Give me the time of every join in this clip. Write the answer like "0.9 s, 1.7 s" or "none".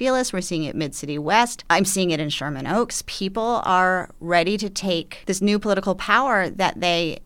1.6 s, 5.1 s